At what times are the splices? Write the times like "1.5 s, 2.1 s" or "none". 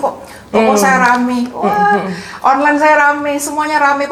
none